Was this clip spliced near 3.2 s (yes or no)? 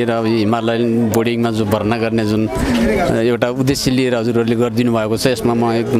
no